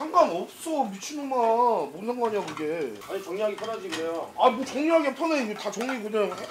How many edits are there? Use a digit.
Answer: 0